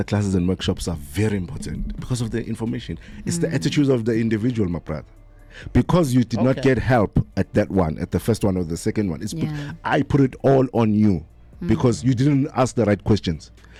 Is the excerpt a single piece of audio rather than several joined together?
yes; 0 cuts

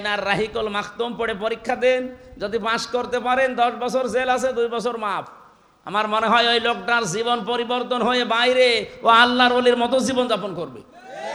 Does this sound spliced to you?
no; 0 cuts

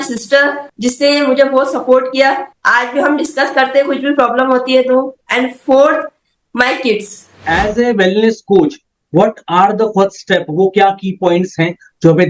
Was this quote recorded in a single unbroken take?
no; 1 cut; at 7.4 s

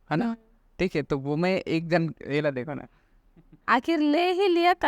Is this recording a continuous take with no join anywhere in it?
no; 1 cut; at 3.5 s

